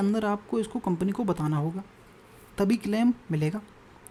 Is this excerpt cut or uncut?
uncut